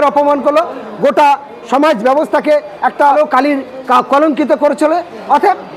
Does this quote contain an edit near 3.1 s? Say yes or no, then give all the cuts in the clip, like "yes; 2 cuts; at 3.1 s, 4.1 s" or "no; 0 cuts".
yes; 1 cut; at 3.1 s